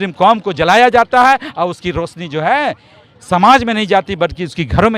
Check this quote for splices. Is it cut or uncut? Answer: uncut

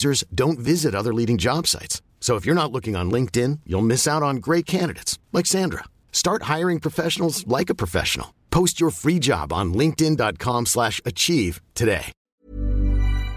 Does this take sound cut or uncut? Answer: cut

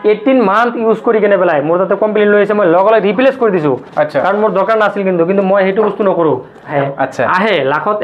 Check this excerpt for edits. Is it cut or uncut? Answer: uncut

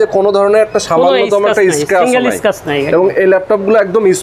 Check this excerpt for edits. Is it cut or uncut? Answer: uncut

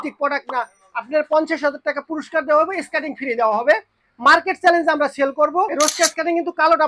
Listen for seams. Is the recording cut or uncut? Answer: cut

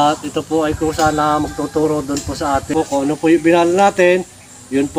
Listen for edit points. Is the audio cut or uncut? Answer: cut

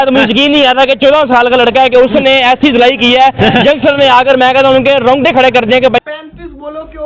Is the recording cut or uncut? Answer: cut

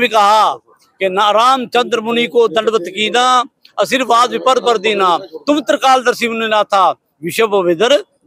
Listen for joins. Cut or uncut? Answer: uncut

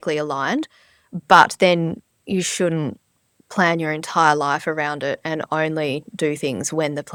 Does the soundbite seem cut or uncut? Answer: uncut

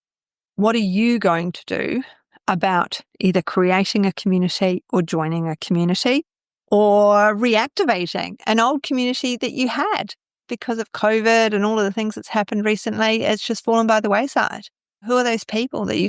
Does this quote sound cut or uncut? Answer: uncut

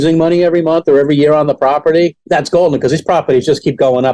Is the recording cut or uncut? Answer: cut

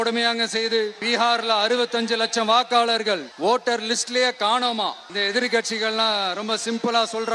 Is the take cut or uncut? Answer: cut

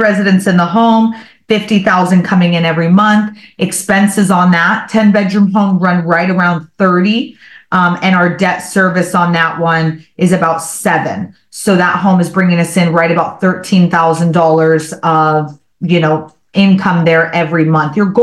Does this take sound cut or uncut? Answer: uncut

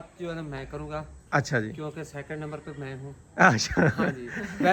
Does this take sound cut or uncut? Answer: uncut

